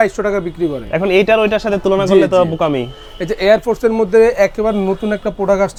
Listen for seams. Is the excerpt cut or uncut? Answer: uncut